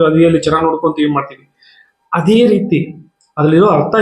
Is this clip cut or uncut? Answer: uncut